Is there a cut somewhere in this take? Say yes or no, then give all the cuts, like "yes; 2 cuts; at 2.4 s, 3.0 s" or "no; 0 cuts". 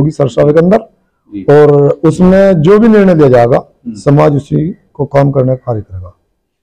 no; 0 cuts